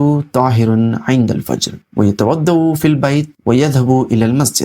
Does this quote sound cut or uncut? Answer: cut